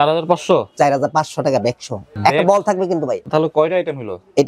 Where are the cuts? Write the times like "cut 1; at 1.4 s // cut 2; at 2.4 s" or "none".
cut 1; at 2.1 s // cut 2; at 3.3 s